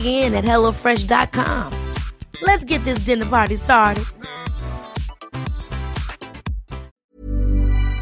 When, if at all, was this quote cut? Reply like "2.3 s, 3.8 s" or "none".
7.0 s